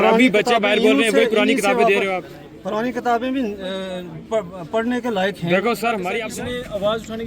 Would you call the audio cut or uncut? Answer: cut